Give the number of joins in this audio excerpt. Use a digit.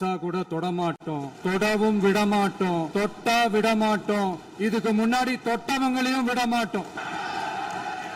3